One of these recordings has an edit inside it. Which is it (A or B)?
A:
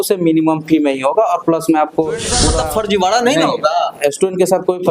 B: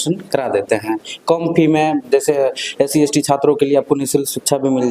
A